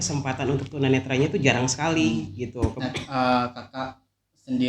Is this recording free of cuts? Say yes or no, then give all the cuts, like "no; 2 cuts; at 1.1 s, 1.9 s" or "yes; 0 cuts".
no; 1 cut; at 2.8 s